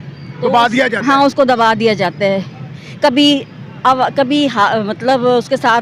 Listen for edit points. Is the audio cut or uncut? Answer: uncut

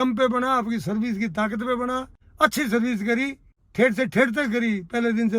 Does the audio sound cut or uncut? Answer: uncut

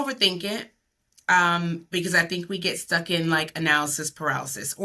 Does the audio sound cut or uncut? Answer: uncut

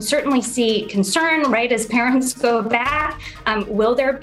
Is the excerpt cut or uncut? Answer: uncut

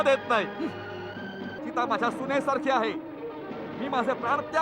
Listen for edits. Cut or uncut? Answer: cut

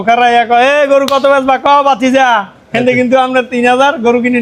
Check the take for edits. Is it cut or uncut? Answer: uncut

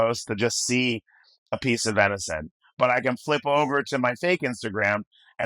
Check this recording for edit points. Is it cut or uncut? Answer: uncut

